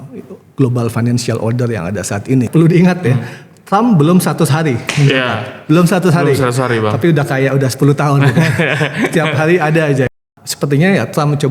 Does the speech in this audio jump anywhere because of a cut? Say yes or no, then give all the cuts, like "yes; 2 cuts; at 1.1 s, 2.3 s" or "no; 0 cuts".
yes; 2 cuts; at 2.5 s, 10.2 s